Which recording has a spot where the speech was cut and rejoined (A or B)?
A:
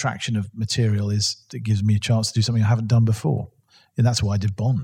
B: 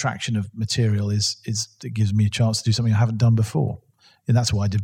A